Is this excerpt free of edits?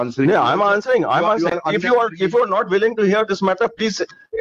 yes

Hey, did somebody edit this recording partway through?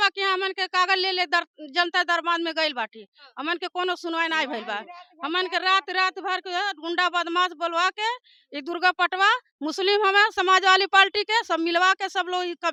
no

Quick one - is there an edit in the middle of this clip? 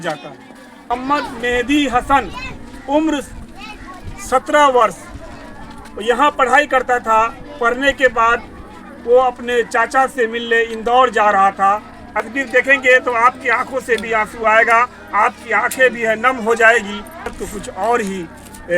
yes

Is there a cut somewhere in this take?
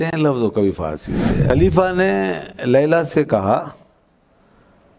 yes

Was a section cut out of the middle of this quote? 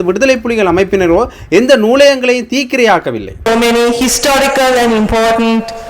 yes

